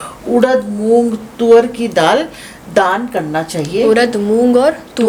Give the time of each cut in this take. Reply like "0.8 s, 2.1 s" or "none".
none

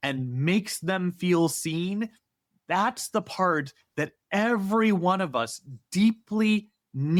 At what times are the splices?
none

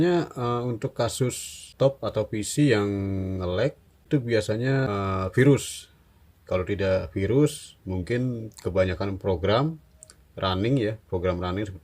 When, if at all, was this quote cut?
1.7 s, 4.0 s, 4.9 s

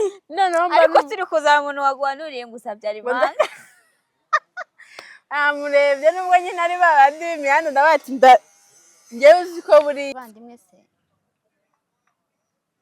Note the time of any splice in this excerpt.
10.1 s

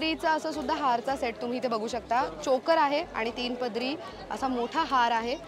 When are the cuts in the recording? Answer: none

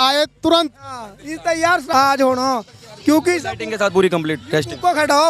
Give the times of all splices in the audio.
1.9 s

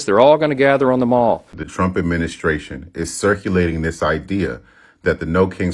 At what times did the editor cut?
1.6 s

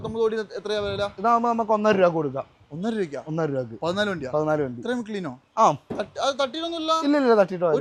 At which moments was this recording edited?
none

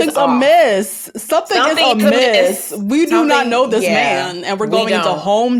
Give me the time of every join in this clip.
none

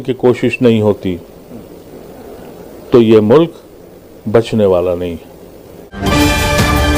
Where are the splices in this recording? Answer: 6.0 s

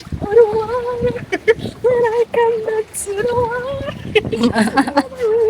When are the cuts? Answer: none

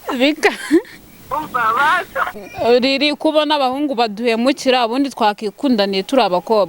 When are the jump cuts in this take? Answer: 2.4 s

